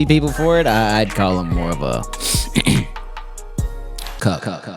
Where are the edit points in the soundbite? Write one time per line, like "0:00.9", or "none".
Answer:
none